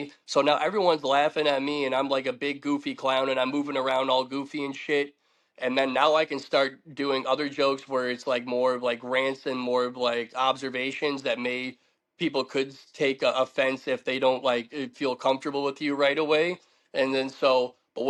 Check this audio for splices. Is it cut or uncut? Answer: uncut